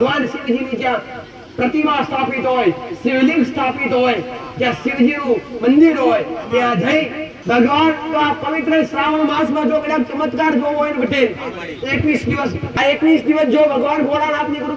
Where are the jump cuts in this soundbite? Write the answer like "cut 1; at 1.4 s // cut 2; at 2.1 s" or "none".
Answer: cut 1; at 7.3 s // cut 2; at 12.6 s